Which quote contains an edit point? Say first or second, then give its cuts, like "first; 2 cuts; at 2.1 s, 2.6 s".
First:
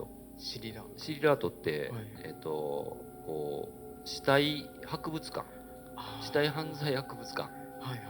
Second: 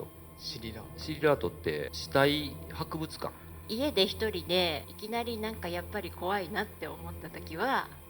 second; 3 cuts; at 2.0 s, 3.6 s, 4.8 s